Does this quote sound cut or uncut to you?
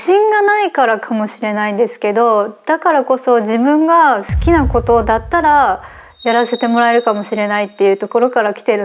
uncut